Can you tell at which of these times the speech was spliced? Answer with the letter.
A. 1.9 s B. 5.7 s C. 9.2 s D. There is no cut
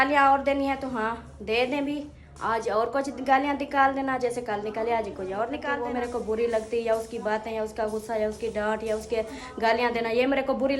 B